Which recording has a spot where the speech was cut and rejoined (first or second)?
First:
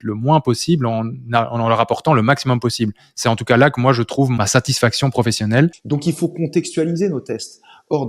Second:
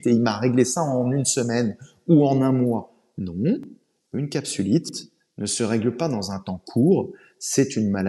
first